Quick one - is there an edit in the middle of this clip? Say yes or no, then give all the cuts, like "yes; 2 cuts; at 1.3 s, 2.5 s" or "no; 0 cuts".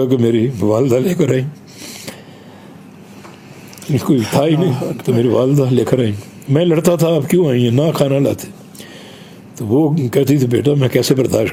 no; 0 cuts